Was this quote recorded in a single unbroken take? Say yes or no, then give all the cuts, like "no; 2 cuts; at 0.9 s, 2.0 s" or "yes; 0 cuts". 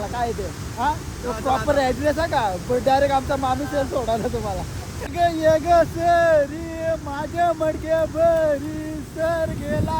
no; 1 cut; at 5.0 s